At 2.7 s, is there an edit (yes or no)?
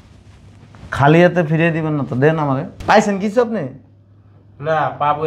yes